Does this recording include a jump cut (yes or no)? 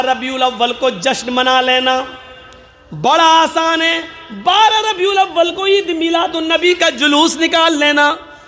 no